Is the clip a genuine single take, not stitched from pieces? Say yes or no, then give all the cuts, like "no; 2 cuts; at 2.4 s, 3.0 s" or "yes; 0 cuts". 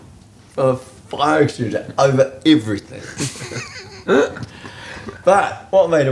yes; 0 cuts